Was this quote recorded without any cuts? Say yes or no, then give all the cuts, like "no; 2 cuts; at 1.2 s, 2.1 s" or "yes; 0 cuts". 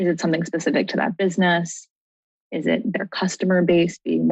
yes; 0 cuts